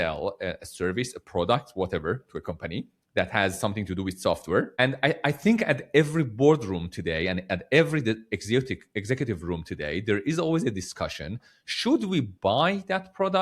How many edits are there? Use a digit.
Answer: 1